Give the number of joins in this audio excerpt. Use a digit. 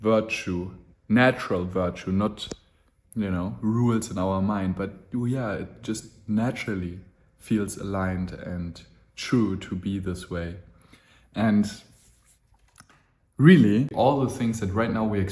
1